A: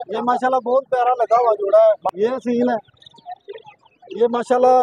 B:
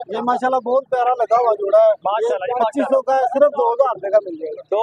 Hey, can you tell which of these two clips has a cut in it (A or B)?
A